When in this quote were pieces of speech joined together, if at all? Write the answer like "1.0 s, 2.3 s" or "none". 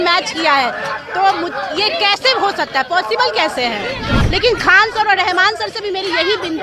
4.2 s